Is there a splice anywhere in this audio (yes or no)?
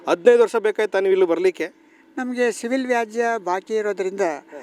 no